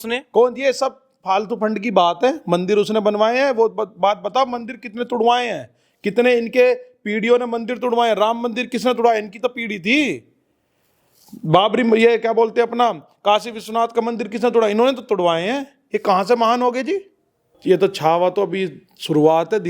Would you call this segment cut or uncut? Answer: cut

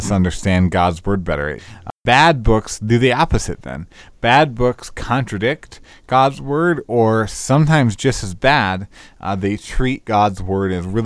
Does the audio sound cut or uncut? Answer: cut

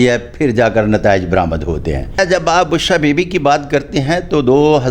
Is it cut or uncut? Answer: cut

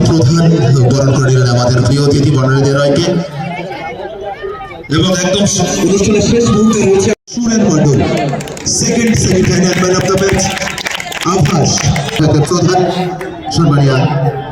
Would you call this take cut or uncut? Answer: cut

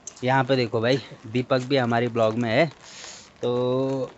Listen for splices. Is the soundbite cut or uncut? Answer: uncut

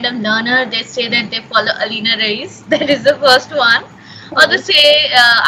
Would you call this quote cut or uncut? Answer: uncut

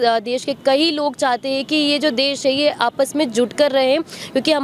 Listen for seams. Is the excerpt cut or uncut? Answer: uncut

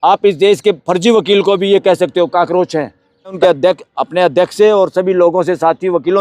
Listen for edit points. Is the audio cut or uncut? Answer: cut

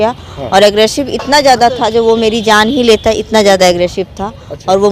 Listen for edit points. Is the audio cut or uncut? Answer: uncut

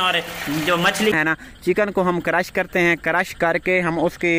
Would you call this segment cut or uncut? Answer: cut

